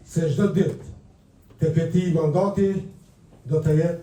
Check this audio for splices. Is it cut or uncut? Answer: uncut